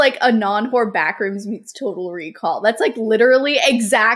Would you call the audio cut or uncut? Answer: uncut